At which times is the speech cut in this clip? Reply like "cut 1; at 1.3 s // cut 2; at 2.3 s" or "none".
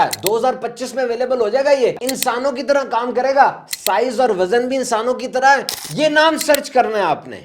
cut 1; at 2.1 s // cut 2; at 5.8 s